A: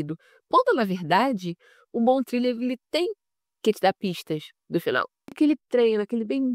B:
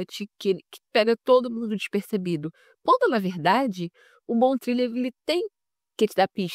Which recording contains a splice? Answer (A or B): A